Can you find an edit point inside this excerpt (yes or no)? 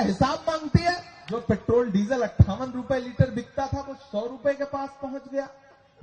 yes